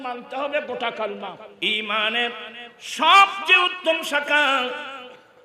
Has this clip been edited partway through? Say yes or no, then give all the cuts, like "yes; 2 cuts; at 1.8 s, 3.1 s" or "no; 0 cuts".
yes; 1 cut; at 1.5 s